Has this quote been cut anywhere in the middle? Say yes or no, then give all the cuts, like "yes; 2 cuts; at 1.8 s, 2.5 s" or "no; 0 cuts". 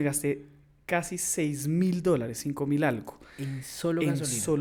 no; 0 cuts